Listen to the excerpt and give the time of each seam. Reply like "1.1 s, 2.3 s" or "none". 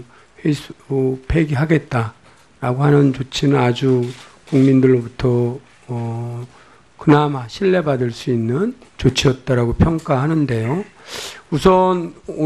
9.4 s